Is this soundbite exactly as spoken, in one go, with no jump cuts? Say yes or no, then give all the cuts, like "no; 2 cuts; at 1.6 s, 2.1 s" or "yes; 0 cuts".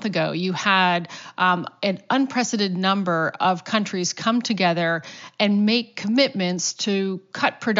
yes; 0 cuts